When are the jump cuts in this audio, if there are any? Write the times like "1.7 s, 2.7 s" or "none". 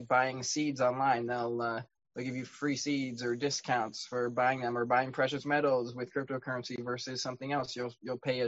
none